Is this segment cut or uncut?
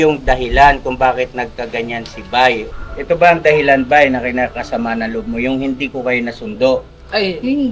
cut